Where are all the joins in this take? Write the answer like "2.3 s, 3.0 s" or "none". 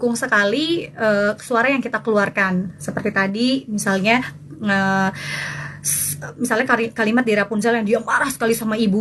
none